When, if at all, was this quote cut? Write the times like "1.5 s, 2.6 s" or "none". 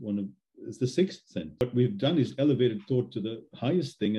1.6 s